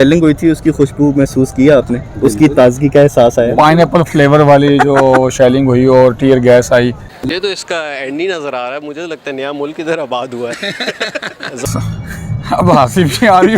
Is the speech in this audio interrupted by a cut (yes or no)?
yes